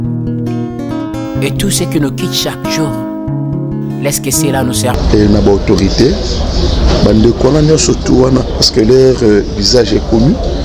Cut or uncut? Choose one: cut